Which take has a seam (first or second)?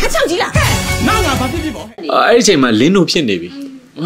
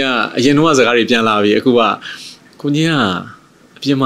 first